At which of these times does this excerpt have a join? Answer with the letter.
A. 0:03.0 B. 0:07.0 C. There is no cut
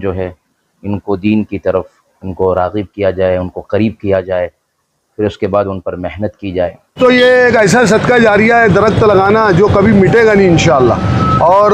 B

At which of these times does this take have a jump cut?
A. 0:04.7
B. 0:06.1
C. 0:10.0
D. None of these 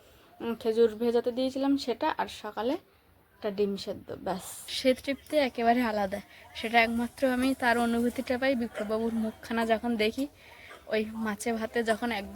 A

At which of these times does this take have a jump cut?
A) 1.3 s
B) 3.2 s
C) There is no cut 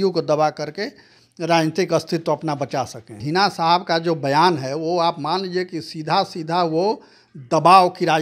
B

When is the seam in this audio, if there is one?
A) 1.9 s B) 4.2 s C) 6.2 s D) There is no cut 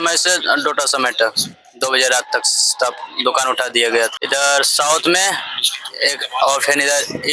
B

